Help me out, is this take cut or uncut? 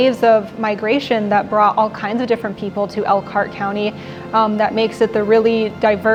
uncut